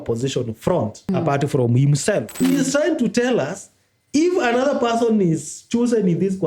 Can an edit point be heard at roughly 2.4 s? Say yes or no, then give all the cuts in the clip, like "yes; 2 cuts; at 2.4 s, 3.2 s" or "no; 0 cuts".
yes; 2 cuts; at 1.1 s, 2.4 s